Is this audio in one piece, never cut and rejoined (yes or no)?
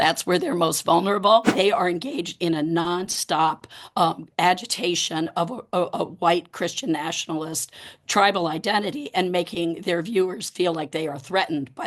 no